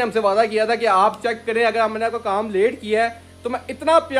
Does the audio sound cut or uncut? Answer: uncut